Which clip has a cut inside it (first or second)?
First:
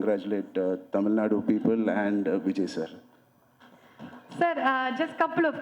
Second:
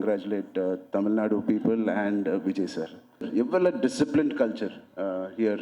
second